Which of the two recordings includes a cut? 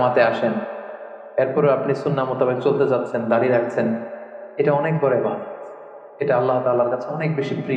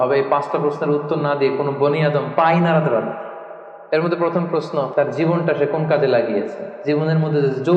second; 3 cuts; at 3.7 s, 5.0 s, 6.7 s

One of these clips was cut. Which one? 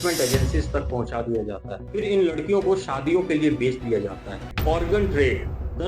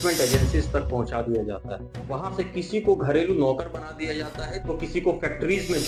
first; 2 cuts; at 1.8 s, 4.5 s

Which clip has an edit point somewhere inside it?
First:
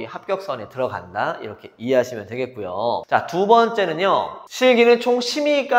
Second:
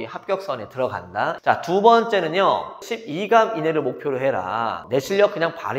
second; 3 cuts; at 1.4 s, 2.8 s, 4.8 s

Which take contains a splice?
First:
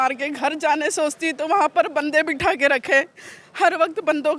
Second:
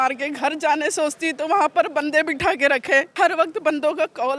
second; 1 cut; at 3.1 s

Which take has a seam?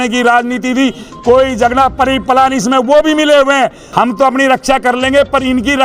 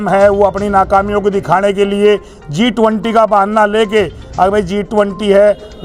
first; 1 cut; at 3.8 s

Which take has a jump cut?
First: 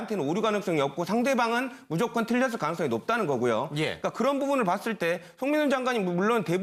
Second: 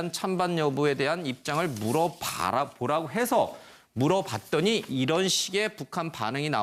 second; 1 cut; at 2.9 s

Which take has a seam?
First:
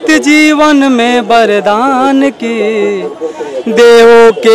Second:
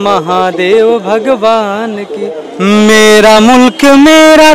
second; 1 cut; at 2.4 s

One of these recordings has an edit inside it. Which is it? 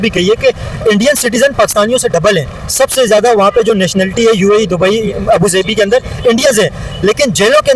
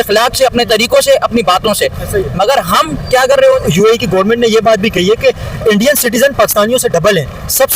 second; 1 cut; at 3.6 s

